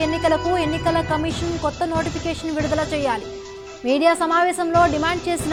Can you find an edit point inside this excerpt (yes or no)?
no